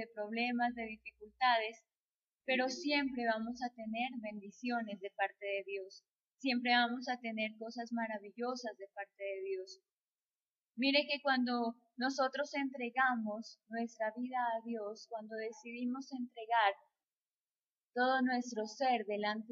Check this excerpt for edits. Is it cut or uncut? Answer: uncut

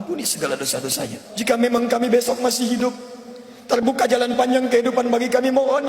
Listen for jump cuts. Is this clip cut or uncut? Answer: cut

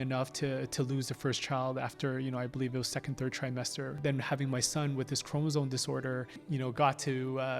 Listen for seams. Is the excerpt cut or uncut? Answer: cut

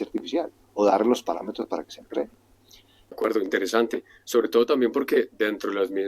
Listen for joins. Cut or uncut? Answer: cut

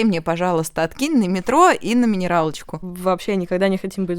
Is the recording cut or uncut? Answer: cut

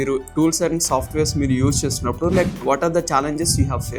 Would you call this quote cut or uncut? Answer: uncut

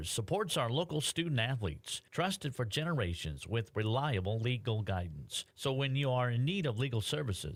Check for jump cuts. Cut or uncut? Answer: uncut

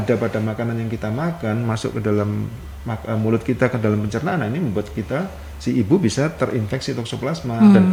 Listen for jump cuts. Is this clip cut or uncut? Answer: uncut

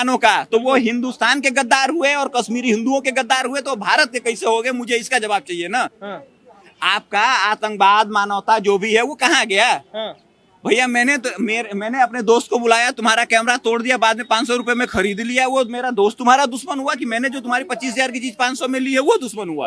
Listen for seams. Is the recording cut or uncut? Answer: uncut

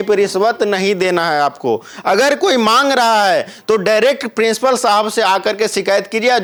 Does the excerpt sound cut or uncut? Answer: uncut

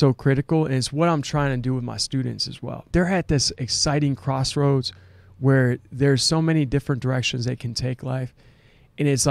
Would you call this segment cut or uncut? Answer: cut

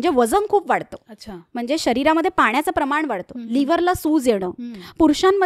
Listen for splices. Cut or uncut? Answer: uncut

